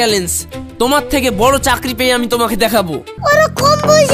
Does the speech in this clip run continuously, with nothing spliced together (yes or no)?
no